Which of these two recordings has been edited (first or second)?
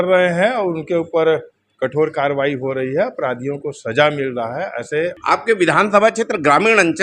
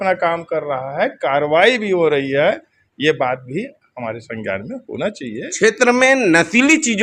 first